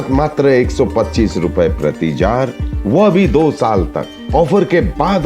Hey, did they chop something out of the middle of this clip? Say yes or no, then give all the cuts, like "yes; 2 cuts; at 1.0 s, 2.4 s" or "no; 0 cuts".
no; 0 cuts